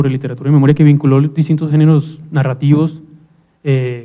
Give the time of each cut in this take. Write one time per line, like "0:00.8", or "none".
0:02.2